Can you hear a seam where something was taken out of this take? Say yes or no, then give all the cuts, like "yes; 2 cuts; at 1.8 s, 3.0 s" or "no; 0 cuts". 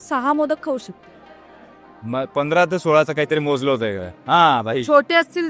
no; 0 cuts